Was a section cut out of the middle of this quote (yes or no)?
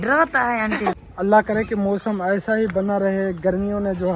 yes